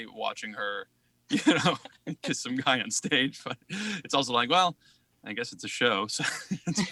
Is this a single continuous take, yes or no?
yes